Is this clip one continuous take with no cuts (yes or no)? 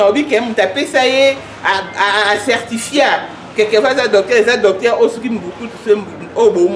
yes